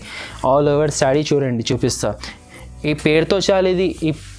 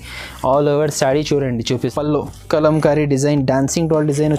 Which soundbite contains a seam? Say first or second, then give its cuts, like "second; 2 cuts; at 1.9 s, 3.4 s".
second; 1 cut; at 1.8 s